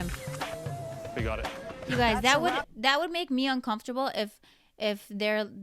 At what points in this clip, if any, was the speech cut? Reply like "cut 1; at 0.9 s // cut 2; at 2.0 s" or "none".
none